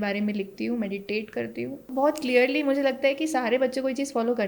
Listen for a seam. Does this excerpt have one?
yes; 1 cut; at 1.9 s

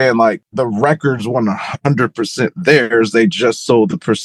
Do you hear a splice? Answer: no; 0 cuts

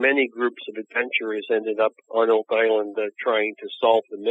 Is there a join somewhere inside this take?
no; 0 cuts

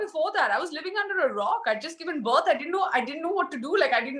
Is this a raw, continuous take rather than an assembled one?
yes; 0 cuts

